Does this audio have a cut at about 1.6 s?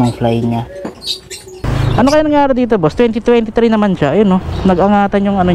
yes; 1 cut; at 1.6 s

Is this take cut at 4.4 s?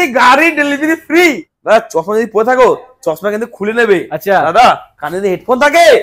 no; 1 cut; at 1.5 s

